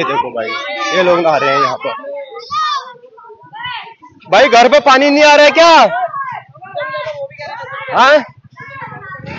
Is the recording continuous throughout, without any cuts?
yes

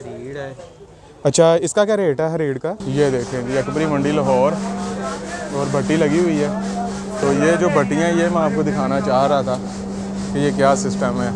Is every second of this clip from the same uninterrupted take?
no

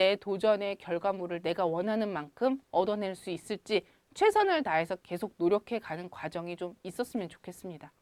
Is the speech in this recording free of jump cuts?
yes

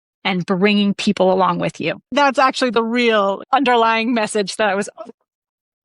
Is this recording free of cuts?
no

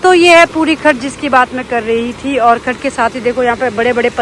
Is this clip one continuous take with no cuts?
yes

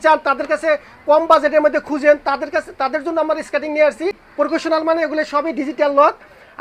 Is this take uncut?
no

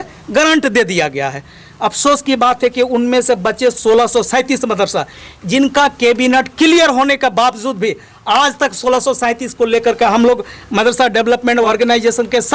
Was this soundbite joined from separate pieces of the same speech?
no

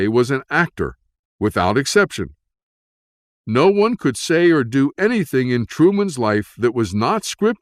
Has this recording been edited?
no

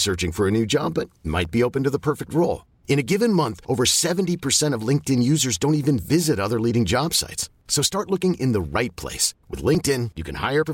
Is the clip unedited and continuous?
yes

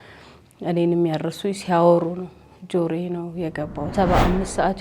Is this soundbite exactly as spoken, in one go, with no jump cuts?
no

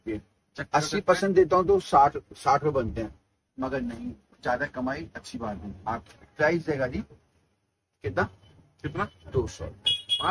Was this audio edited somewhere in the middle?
yes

